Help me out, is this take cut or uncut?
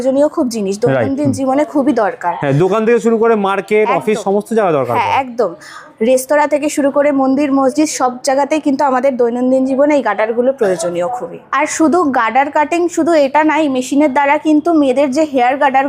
uncut